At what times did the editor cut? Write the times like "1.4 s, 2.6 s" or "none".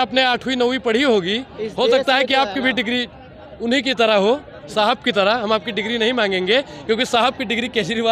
none